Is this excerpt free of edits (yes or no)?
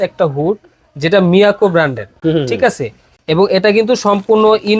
yes